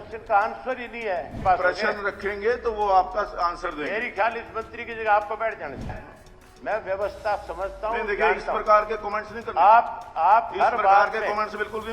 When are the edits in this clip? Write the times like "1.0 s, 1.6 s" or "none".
1.3 s, 6.0 s